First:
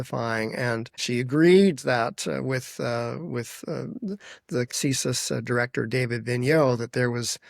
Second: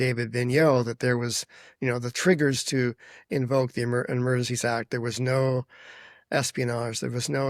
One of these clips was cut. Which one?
first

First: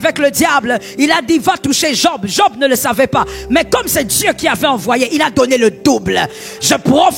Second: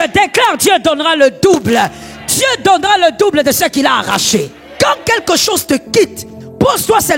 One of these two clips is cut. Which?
second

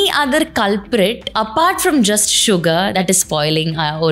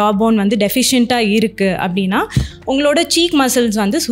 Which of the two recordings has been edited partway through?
first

